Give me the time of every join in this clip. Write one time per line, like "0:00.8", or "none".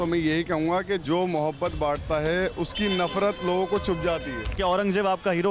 0:01.0
0:04.5

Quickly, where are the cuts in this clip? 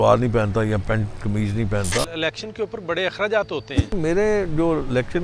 0:02.1
0:04.0

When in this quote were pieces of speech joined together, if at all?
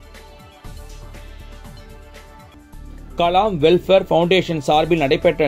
0:01.0

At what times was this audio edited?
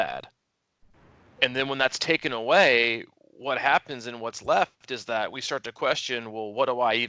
none

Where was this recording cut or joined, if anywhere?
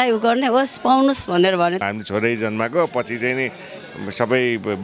0:01.8

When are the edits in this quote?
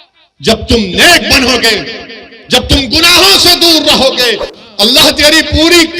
0:04.5

